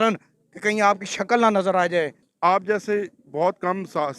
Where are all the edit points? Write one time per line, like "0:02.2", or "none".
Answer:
0:02.2